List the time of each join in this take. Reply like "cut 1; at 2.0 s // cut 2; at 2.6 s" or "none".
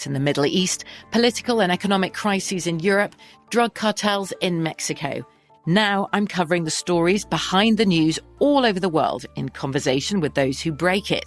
none